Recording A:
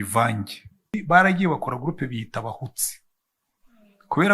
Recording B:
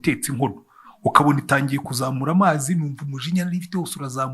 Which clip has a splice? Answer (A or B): A